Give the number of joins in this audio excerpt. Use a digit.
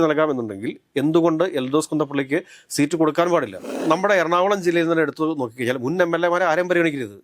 1